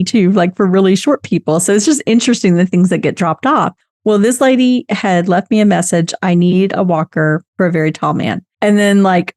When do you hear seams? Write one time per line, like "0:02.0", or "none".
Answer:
0:07.5
0:08.5